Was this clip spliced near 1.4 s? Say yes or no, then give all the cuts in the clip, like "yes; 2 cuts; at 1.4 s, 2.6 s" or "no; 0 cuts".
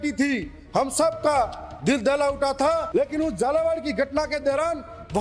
no; 1 cut; at 2.9 s